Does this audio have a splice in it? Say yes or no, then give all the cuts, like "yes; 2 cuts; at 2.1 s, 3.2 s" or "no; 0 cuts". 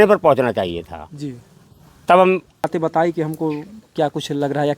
yes; 1 cut; at 2.7 s